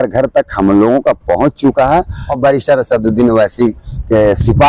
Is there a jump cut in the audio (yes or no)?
yes